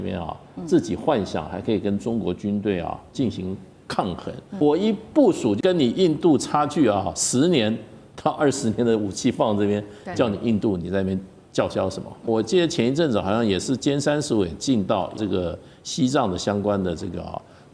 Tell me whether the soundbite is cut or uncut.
cut